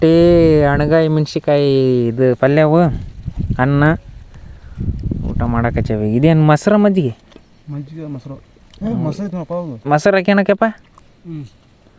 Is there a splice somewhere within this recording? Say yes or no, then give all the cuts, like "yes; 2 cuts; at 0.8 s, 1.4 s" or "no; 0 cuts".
no; 0 cuts